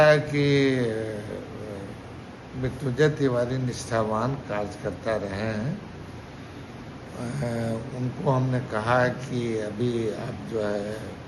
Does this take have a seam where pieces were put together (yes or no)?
no